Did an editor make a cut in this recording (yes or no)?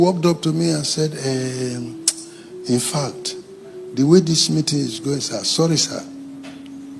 no